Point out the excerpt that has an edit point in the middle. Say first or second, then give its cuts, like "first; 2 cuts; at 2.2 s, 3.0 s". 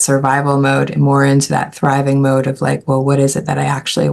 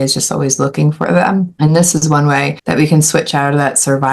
second; 2 cuts; at 1.5 s, 2.6 s